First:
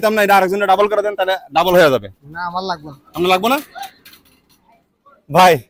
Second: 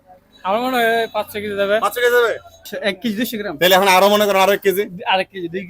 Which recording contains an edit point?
second; 1 cut; at 2.7 s

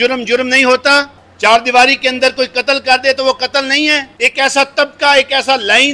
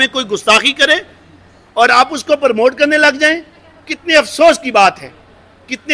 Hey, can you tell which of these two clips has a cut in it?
first; 2 cuts; at 1.2 s, 4.1 s

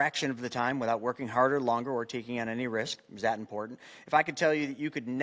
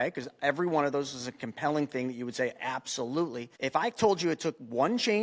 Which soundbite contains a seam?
second; 1 cut; at 3.5 s

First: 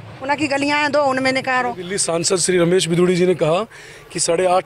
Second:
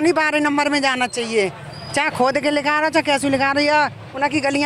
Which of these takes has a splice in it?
first; 1 cut; at 1.9 s

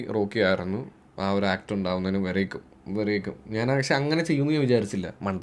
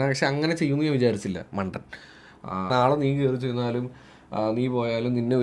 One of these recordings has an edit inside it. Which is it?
second; 1 cut; at 2.7 s

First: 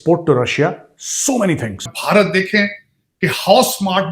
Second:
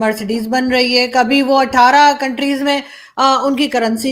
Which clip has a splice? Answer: first; 1 cut; at 1.9 s

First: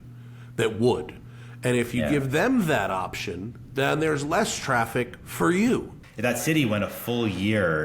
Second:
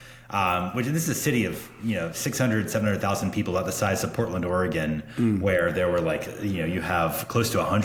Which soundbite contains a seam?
first; 1 cut; at 6.0 s

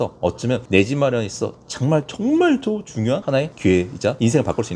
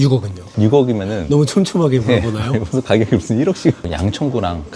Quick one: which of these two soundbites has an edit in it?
second; 1 cut; at 3.8 s

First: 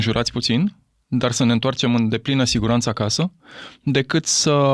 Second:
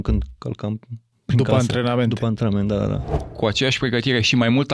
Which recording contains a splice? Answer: second; 1 cut; at 3.2 s

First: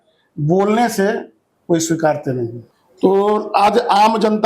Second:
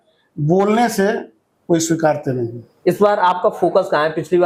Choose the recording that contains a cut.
first; 1 cut; at 2.6 s

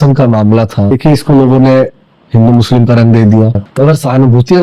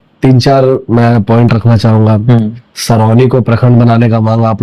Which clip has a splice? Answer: first; 2 cuts; at 0.9 s, 3.6 s

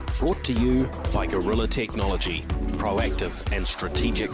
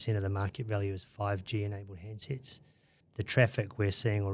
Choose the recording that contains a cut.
second; 1 cut; at 3.0 s

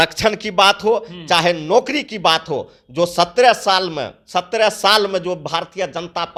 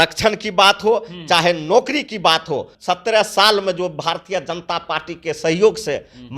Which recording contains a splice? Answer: second; 1 cut; at 2.8 s

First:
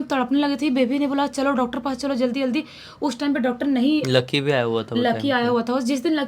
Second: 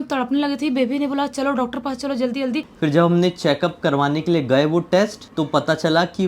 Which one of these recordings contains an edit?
second; 2 cuts; at 2.7 s, 5.2 s

